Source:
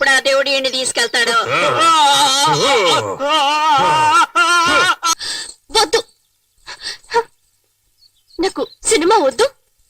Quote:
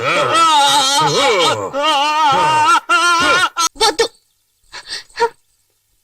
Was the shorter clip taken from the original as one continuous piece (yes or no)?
no